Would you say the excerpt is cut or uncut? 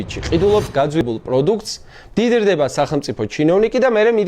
cut